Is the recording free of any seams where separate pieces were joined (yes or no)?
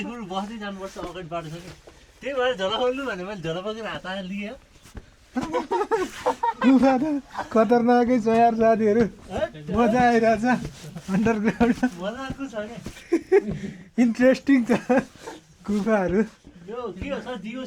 yes